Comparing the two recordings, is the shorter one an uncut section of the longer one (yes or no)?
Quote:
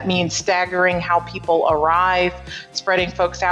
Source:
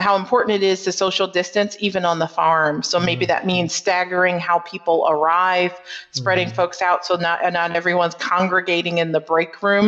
yes